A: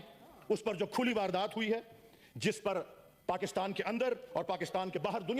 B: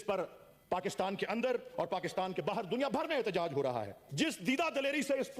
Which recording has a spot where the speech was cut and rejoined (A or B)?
B